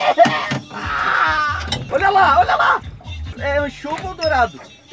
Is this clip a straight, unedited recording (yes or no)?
no